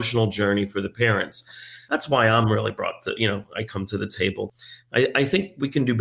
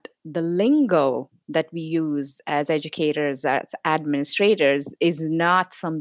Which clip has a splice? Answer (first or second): first